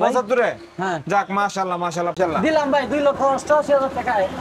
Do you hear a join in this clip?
yes; 1 cut; at 2.2 s

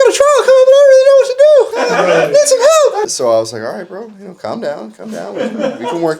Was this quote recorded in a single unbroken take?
no; 2 cuts; at 1.8 s, 3.1 s

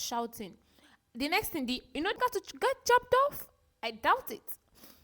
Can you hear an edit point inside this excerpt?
yes; 1 cut; at 2.2 s

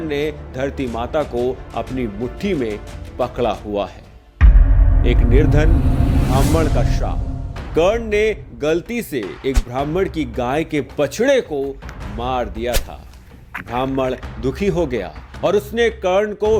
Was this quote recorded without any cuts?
yes; 0 cuts

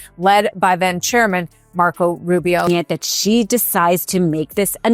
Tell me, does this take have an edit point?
yes; 1 cut; at 2.7 s

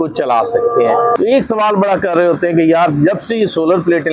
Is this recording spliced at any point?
yes; 1 cut; at 1.1 s

